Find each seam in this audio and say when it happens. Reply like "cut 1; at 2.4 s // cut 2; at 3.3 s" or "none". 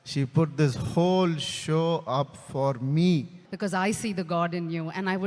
cut 1; at 3.4 s